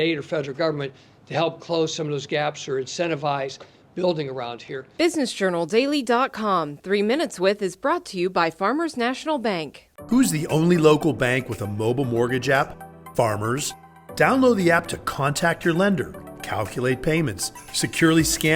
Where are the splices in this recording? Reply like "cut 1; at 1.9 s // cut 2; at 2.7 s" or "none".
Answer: cut 1; at 4.9 s